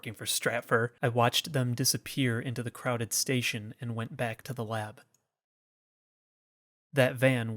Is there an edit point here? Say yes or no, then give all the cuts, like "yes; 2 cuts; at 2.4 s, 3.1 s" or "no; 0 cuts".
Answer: yes; 1 cut; at 0.9 s